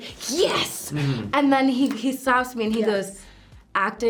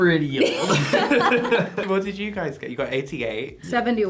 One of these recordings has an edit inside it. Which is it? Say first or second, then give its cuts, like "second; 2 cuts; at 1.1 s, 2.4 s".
second; 1 cut; at 1.8 s